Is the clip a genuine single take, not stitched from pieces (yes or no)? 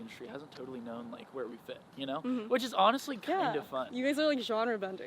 yes